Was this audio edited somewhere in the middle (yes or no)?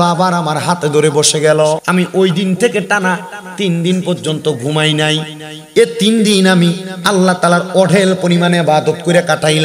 yes